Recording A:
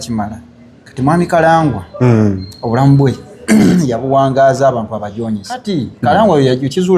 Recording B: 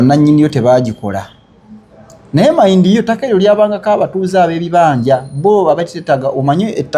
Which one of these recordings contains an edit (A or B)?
A